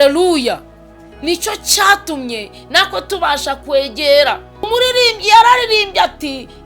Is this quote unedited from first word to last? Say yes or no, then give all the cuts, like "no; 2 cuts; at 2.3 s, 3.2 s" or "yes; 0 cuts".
no; 1 cut; at 4.7 s